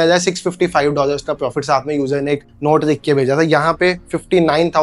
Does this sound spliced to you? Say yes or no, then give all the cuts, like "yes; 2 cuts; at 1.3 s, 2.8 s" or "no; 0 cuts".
no; 0 cuts